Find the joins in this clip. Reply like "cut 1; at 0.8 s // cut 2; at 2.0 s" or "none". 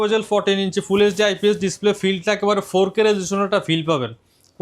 none